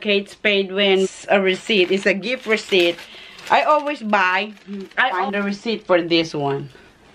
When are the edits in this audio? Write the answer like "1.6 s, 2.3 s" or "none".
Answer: 1.1 s, 5.2 s